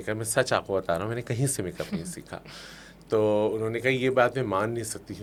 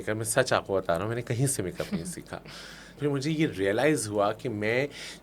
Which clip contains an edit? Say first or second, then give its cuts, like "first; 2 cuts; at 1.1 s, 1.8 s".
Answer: second; 1 cut; at 2.9 s